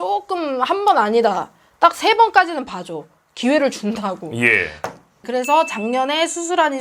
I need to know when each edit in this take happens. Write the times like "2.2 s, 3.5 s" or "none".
5.2 s